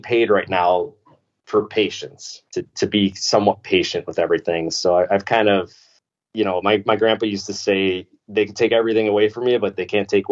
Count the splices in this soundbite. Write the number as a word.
one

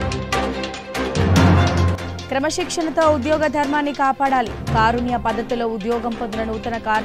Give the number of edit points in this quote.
one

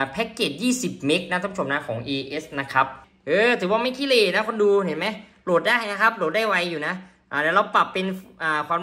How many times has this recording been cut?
one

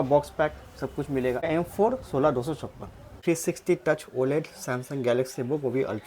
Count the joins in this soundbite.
two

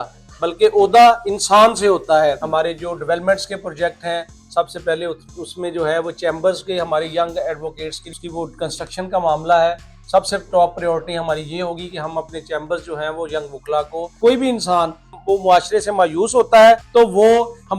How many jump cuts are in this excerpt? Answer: five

